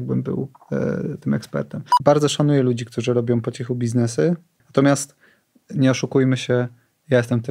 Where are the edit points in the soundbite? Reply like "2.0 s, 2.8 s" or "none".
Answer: 1.8 s, 4.6 s